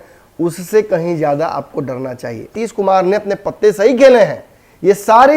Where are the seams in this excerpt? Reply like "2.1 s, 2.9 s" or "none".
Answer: 2.5 s